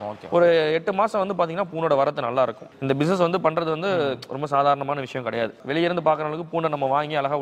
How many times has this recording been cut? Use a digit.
1